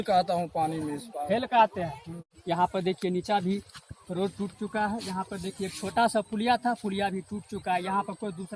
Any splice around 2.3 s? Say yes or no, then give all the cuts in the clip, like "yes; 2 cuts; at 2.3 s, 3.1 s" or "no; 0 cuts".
yes; 1 cut; at 2.3 s